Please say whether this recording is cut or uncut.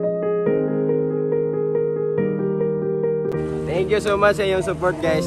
cut